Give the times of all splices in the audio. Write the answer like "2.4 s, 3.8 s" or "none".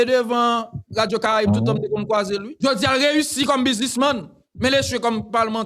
2.5 s